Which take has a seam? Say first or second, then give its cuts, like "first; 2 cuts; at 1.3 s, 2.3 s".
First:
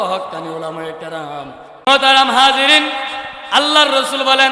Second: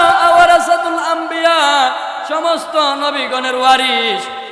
first; 1 cut; at 1.9 s